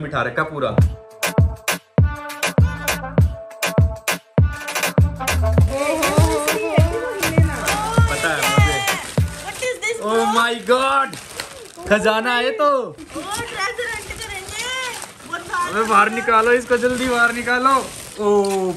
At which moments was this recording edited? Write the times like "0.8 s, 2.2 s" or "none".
none